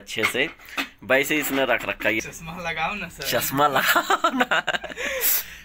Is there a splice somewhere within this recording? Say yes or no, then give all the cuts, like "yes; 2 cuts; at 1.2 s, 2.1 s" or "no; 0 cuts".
yes; 1 cut; at 2.2 s